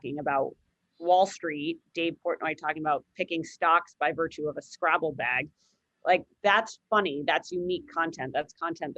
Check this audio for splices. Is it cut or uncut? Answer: uncut